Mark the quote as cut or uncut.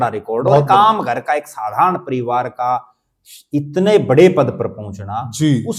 uncut